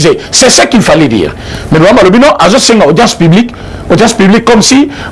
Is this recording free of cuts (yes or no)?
yes